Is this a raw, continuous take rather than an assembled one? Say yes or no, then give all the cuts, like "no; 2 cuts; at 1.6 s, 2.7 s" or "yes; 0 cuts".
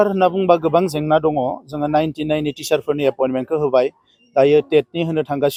yes; 0 cuts